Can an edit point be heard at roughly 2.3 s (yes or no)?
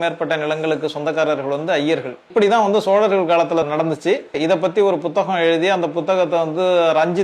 yes